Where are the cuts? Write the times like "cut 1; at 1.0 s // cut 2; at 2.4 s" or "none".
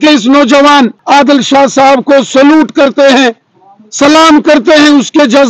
cut 1; at 1.0 s